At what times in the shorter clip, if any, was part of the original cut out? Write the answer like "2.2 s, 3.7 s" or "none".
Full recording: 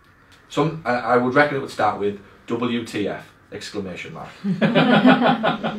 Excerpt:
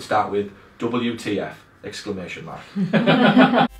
none